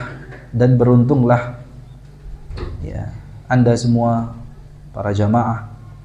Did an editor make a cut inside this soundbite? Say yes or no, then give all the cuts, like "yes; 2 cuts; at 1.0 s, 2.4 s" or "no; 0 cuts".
no; 0 cuts